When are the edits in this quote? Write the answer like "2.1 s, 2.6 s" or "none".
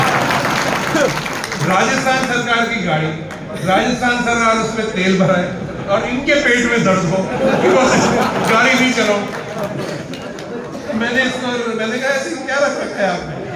none